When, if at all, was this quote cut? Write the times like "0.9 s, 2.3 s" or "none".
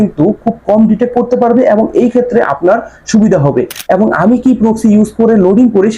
3.7 s